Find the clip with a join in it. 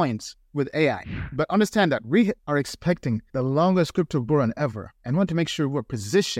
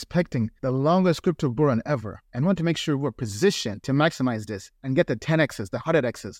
first; 1 cut; at 1.2 s

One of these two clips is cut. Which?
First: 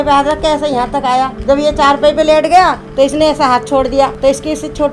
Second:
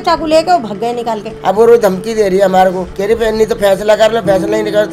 second; 1 cut; at 1.3 s

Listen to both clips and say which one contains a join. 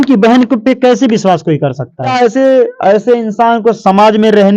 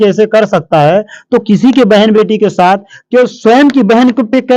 first; 1 cut; at 2.0 s

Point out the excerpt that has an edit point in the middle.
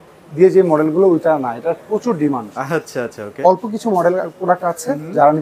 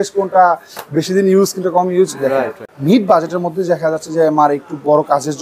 second; 1 cut; at 2.6 s

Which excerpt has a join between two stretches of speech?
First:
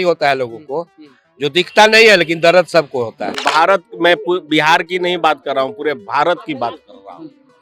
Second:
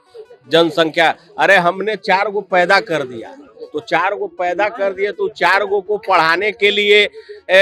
first; 1 cut; at 3.4 s

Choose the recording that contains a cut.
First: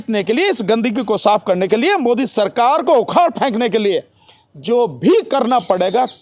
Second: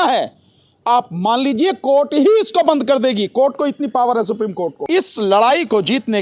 second; 1 cut; at 4.8 s

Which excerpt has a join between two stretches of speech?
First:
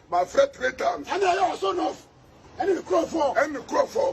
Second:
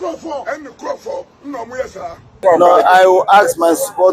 second; 1 cut; at 2.3 s

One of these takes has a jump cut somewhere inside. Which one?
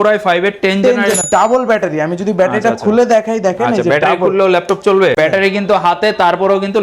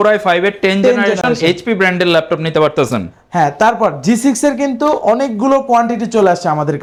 first; 2 cuts; at 1.2 s, 5.2 s

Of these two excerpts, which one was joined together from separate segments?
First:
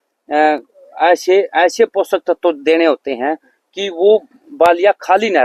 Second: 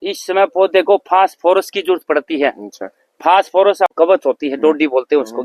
second; 1 cut; at 3.9 s

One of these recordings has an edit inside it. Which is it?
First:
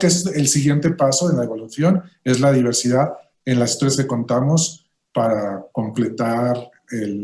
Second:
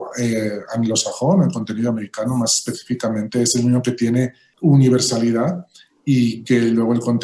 second; 1 cut; at 4.4 s

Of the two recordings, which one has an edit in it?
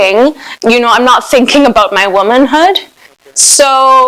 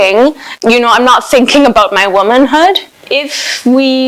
second; 1 cut; at 2.9 s

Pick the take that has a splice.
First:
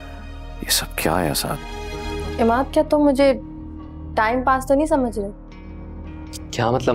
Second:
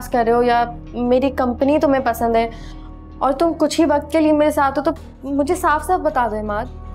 first; 1 cut; at 2.2 s

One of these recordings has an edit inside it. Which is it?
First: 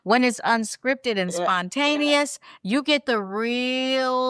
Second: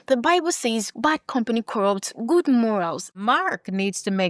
second; 2 cuts; at 0.9 s, 3.1 s

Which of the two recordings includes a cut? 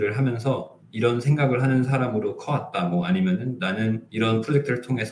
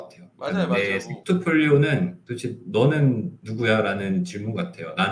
second; 1 cut; at 1.1 s

